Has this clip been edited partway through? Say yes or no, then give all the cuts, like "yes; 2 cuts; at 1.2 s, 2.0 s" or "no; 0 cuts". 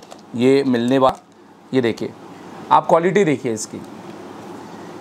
yes; 1 cut; at 1.1 s